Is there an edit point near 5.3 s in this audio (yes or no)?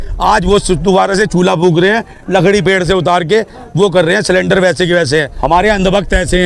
yes